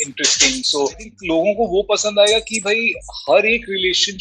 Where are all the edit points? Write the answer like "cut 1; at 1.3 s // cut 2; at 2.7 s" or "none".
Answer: cut 1; at 1.1 s